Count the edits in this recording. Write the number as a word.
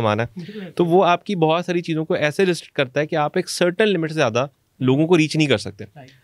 zero